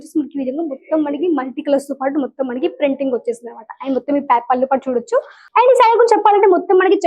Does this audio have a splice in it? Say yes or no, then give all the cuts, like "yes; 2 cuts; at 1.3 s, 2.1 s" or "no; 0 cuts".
yes; 1 cut; at 5.4 s